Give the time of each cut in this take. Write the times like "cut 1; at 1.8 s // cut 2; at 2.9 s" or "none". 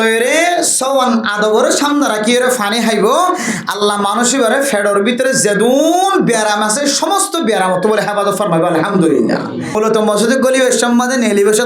cut 1; at 9.9 s